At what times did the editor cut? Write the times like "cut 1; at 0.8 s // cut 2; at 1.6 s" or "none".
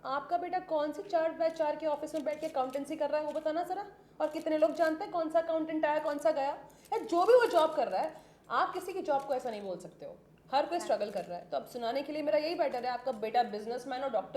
none